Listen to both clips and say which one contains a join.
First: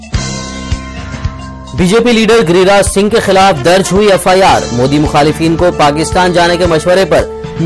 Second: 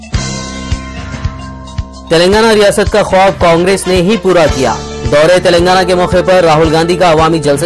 second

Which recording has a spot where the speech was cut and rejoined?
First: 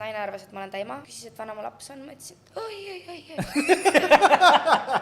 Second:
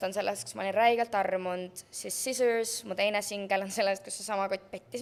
first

